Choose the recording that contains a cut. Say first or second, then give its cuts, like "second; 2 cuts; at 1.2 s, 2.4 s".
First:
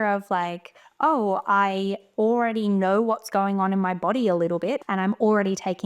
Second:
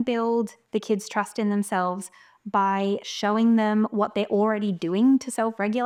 first; 1 cut; at 4.8 s